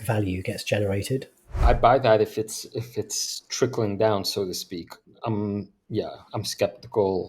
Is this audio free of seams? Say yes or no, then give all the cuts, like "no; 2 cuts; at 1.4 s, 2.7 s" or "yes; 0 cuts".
no; 1 cut; at 1.6 s